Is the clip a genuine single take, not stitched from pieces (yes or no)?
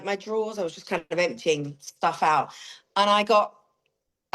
yes